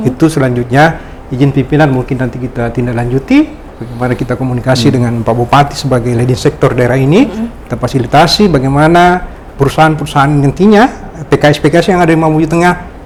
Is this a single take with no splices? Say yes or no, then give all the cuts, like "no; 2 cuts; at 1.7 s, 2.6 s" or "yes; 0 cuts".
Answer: yes; 0 cuts